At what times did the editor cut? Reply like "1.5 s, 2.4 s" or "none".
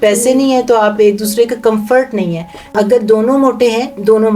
2.7 s